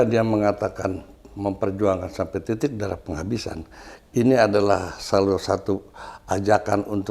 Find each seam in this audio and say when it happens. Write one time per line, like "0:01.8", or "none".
none